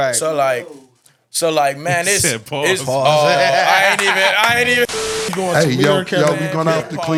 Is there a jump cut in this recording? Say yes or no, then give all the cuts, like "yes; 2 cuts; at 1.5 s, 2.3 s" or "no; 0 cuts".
no; 0 cuts